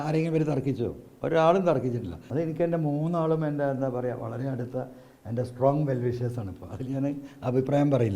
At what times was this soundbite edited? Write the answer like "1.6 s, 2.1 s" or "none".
2.2 s